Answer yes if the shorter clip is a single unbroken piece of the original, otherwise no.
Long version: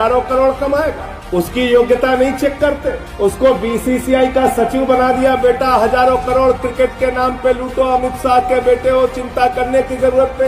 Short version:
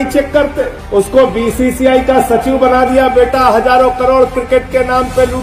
yes